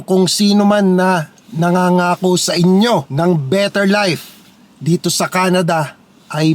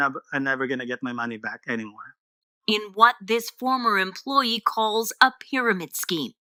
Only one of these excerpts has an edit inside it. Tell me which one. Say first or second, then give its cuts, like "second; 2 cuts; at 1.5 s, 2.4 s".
first; 1 cut; at 3.1 s